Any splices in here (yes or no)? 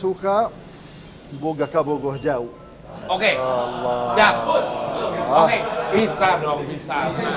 no